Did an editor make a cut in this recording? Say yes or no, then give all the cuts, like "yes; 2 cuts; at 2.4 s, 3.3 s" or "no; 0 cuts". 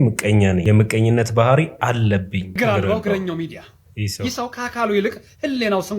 yes; 1 cut; at 2.5 s